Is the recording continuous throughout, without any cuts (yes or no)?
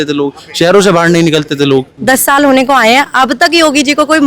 no